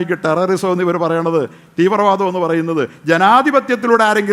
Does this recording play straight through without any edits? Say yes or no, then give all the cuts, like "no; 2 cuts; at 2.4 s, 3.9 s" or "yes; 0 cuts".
yes; 0 cuts